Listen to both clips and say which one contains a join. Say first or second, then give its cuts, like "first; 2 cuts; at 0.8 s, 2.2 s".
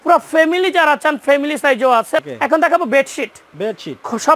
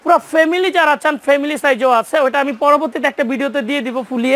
first; 1 cut; at 2.2 s